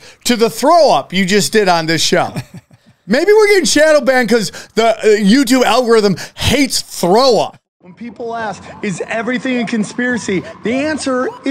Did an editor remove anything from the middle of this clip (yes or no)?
yes